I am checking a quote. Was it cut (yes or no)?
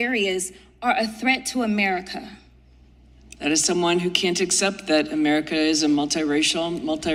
no